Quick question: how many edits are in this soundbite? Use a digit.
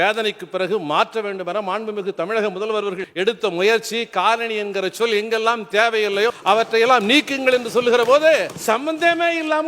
3